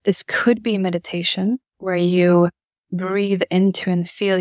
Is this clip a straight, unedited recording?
no; 1 cut; at 1.7 s

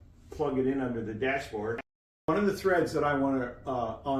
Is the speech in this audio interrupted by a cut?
yes; 1 cut; at 2.1 s

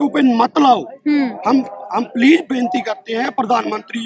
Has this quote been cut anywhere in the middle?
no; 0 cuts

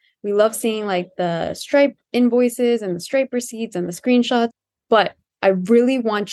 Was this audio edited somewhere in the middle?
no; 0 cuts

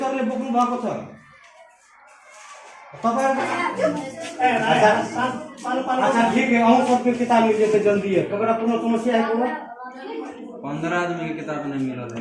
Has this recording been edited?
yes; 1 cut; at 3.4 s

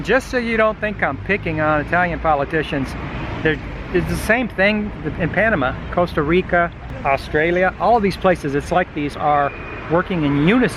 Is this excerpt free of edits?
no; 2 cuts; at 6.9 s, 9.1 s

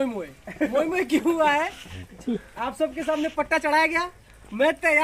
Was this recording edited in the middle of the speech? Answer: no; 0 cuts

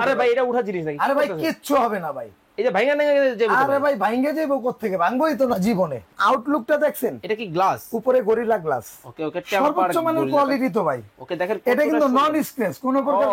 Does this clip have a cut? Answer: yes; 1 cut; at 6.1 s

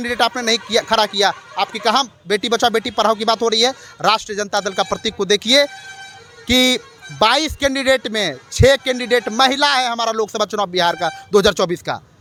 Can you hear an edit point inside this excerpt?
no; 0 cuts

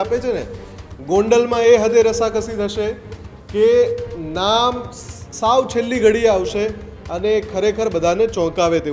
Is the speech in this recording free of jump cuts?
yes; 0 cuts

